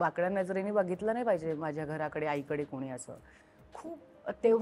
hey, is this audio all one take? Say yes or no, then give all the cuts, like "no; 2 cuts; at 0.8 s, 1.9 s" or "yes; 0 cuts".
yes; 0 cuts